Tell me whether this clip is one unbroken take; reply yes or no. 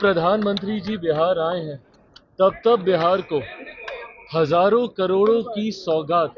yes